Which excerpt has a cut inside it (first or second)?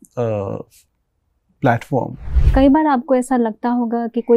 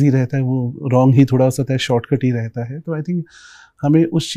first